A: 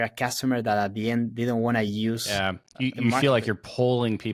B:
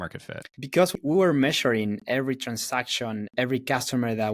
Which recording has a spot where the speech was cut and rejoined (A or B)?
B